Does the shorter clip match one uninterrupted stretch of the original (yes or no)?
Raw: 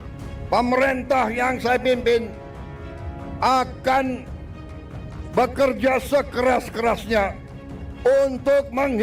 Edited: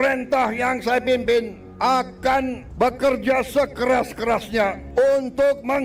no